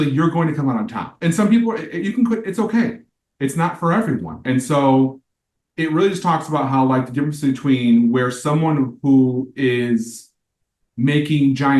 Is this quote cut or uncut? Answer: cut